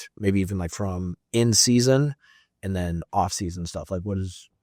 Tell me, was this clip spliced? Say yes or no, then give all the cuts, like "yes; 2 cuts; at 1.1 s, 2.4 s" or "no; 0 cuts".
no; 0 cuts